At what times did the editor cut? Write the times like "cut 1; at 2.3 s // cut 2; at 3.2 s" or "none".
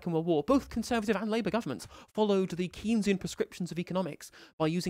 none